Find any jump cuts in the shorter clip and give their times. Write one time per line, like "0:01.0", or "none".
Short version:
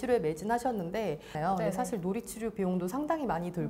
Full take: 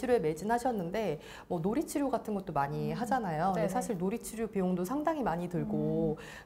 0:01.3